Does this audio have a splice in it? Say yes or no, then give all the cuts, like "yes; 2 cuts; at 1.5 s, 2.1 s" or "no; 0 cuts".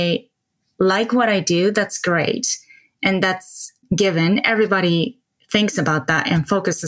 yes; 1 cut; at 3.8 s